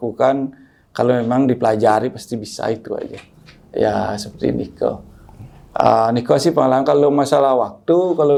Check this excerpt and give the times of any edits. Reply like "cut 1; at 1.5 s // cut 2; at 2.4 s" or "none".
none